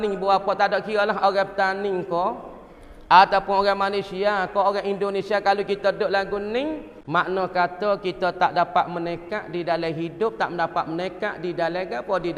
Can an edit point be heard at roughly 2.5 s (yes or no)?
no